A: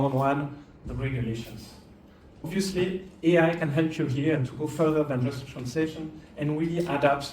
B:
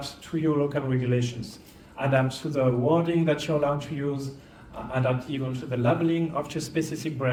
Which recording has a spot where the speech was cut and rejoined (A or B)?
A